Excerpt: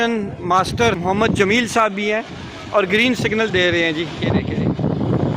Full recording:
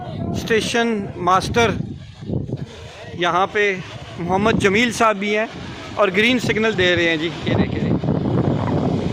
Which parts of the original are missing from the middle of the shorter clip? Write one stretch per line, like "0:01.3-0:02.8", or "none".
0:01.7-0:04.2